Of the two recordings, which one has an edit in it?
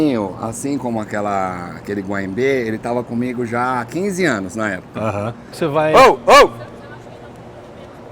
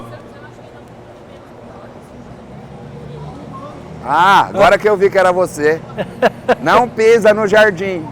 first; 1 cut; at 5.5 s

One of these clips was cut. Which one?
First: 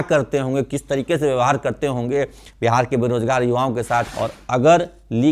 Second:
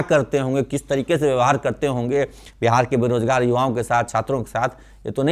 first; 1 cut; at 4.1 s

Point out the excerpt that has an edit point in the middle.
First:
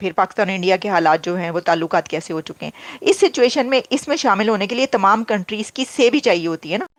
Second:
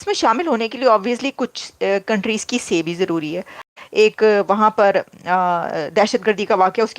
second; 1 cut; at 3.6 s

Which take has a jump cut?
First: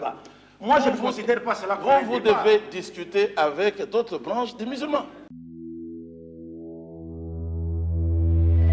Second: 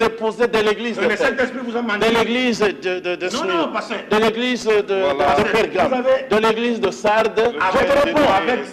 first; 1 cut; at 5.3 s

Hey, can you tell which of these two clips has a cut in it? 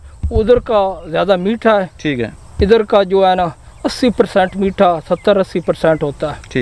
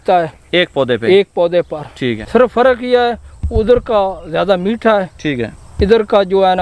second; 1 cut; at 2.1 s

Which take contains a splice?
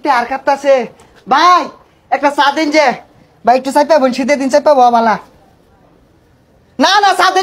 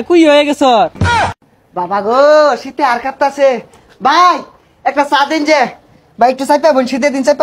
second; 1 cut; at 1.1 s

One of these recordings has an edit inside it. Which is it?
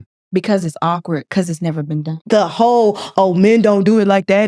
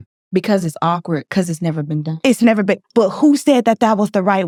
first; 1 cut; at 2.1 s

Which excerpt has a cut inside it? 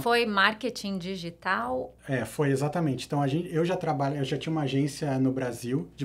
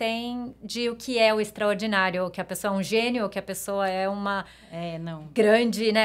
first; 1 cut; at 2.0 s

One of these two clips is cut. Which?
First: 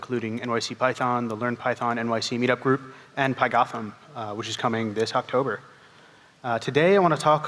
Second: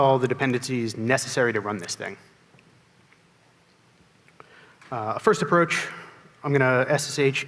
first; 1 cut; at 2.7 s

